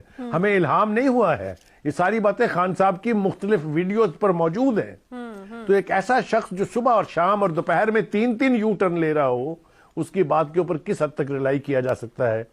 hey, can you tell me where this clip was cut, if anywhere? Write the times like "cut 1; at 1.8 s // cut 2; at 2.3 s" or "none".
none